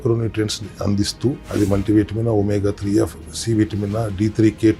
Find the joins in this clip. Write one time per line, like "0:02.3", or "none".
0:01.4